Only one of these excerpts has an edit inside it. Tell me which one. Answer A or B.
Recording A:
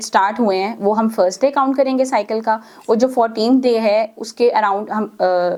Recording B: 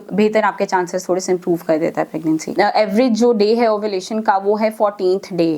B